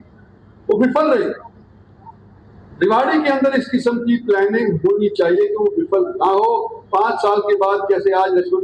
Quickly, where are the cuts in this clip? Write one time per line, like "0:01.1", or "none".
none

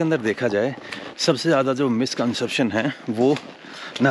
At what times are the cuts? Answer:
none

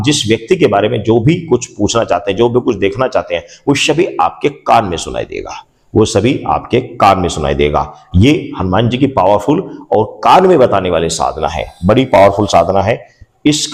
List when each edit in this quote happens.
none

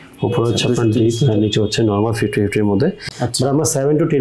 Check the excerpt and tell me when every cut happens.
0:03.0

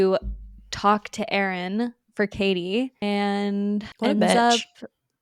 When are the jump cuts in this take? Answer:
0:03.0
0:03.9

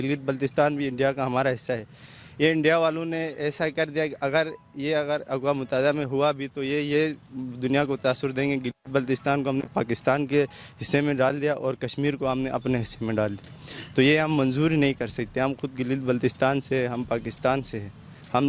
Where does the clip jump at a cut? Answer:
none

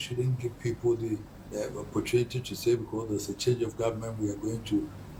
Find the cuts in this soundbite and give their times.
none

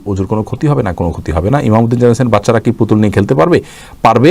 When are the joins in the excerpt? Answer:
none

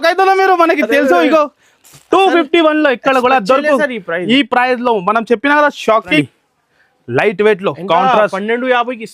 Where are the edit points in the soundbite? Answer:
0:06.2

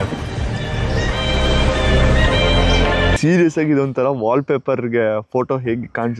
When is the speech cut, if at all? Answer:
0:03.2

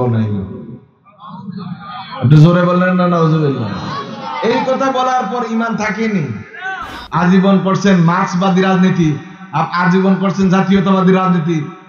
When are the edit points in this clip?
0:06.9

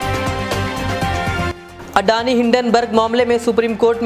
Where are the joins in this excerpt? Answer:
none

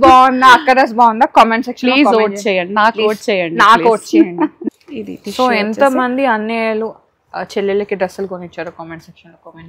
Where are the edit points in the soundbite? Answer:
0:04.6

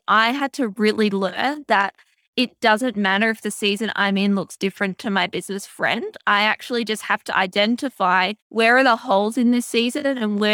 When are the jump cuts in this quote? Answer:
0:08.4

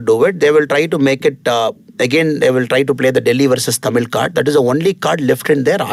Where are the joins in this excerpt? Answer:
none

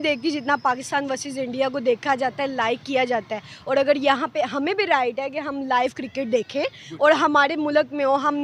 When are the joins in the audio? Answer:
none

